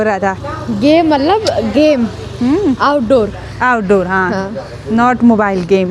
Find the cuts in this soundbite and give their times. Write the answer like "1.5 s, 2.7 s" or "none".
none

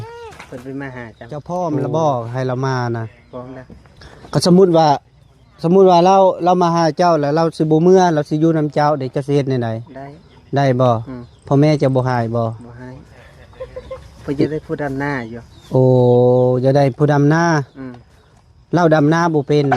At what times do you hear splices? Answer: 1.4 s

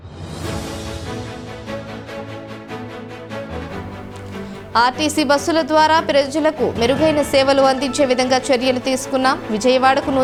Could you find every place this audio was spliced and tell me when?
none

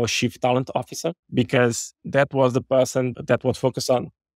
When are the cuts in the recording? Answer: 1.2 s, 1.9 s, 3.1 s

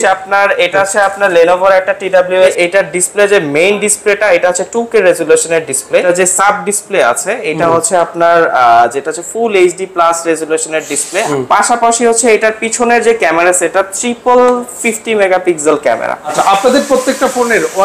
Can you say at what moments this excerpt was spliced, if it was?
2.5 s, 6.0 s, 11.3 s, 16.3 s

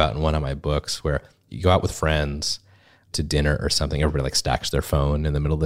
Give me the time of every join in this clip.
1.4 s, 3.1 s

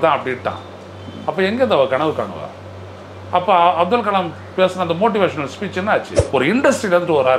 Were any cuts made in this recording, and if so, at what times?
6.2 s

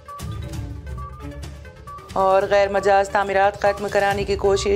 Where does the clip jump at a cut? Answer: 2.0 s

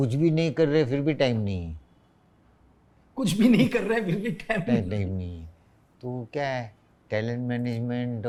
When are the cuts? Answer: none

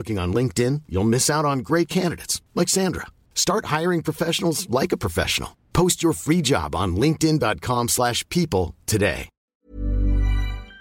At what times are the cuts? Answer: 9.5 s

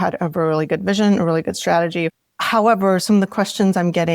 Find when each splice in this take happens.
2.2 s

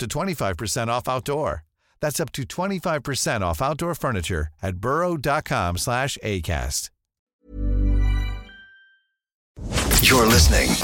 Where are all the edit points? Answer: 9.6 s

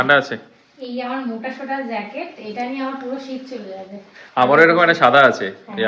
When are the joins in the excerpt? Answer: none

